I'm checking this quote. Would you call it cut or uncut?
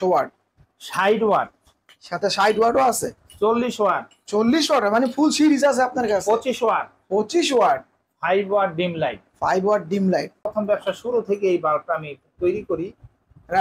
cut